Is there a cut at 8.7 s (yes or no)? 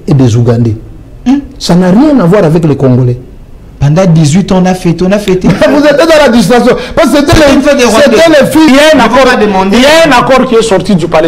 yes